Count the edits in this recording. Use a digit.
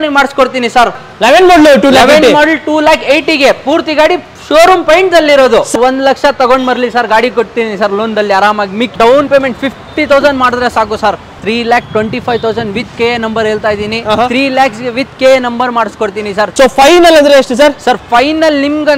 5